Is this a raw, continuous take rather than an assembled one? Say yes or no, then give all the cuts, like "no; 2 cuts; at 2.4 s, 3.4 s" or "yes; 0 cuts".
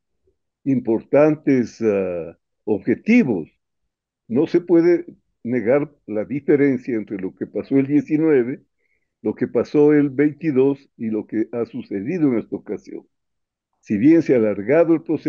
yes; 0 cuts